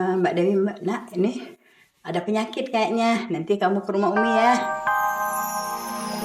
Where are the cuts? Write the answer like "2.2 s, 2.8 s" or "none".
4.6 s